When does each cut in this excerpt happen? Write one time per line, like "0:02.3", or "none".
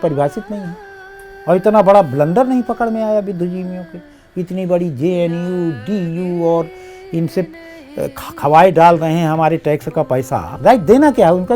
0:10.5

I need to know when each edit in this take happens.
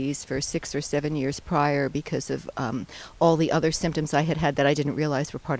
0:04.5

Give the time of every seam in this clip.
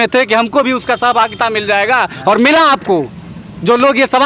none

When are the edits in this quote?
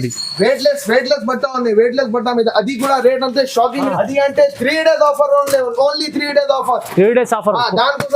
0:03.9

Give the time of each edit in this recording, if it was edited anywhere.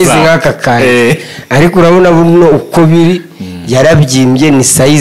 none

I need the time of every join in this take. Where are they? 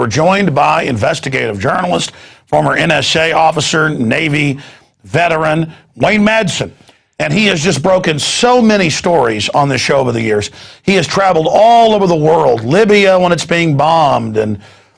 0:01.6

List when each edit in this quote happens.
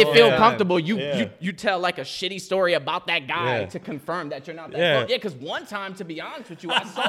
none

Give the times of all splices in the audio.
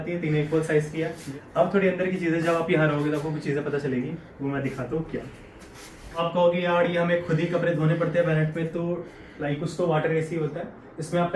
0:01.2
0:06.2
0:09.6

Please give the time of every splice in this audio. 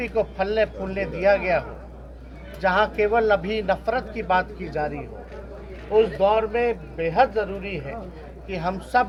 none

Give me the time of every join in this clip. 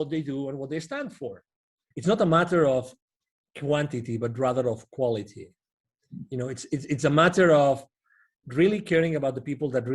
0:01.8

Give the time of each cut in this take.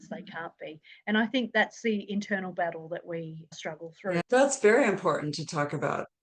none

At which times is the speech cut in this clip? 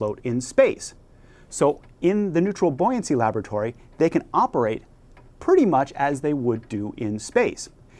none

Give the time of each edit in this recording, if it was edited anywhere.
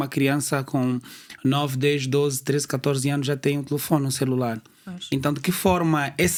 none

